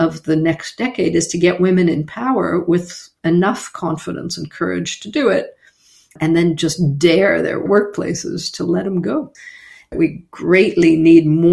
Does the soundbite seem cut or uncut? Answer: cut